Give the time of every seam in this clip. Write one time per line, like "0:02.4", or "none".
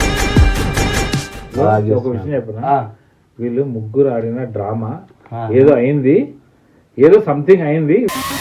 0:01.4